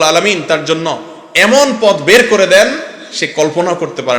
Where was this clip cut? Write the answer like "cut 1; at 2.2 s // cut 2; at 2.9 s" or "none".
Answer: none